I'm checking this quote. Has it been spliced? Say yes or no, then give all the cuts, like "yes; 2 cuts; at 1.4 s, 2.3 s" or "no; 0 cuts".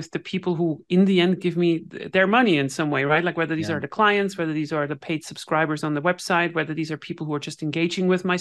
no; 0 cuts